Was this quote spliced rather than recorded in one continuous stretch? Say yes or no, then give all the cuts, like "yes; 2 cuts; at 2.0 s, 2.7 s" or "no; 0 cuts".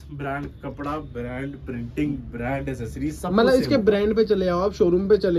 no; 0 cuts